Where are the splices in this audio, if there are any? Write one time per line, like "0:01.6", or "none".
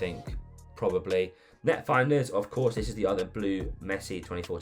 0:01.4